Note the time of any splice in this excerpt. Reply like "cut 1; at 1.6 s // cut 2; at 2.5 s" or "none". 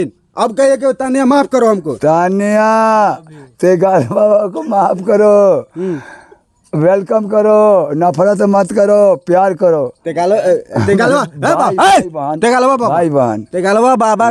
none